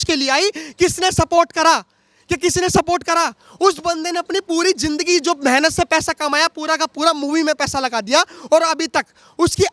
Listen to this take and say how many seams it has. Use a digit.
0